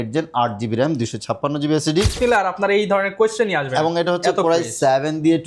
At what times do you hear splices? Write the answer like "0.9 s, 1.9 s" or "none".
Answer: 2.2 s